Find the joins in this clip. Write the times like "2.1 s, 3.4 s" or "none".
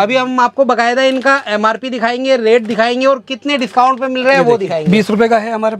4.9 s